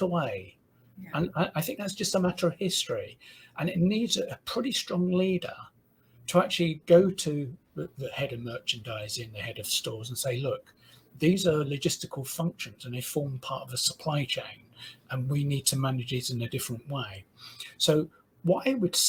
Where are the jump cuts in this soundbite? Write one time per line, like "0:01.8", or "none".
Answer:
none